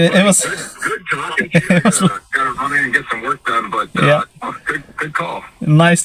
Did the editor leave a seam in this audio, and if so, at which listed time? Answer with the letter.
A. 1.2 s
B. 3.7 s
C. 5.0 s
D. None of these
D